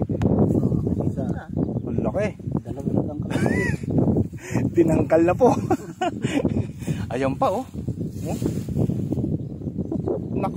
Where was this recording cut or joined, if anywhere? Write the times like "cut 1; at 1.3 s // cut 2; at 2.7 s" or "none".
none